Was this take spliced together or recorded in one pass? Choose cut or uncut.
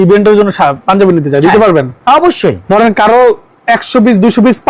cut